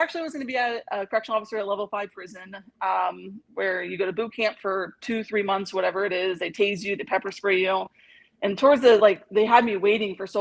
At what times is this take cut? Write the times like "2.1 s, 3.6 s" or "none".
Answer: none

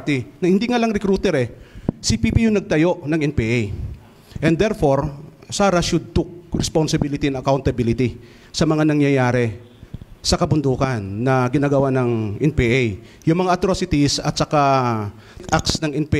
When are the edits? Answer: none

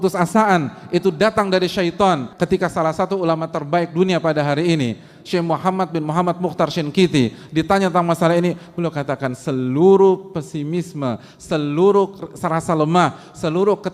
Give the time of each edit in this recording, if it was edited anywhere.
2.3 s

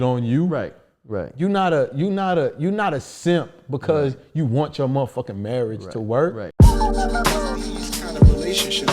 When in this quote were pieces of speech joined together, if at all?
6.5 s

